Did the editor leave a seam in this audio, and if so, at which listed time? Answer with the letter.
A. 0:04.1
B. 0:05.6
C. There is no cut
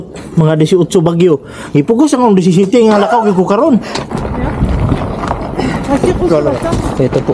A